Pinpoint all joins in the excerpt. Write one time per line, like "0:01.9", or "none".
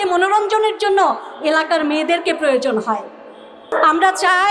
0:03.6